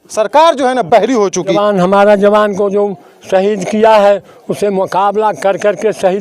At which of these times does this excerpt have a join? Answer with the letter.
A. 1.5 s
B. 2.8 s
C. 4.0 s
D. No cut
A